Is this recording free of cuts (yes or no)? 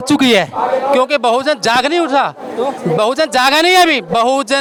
yes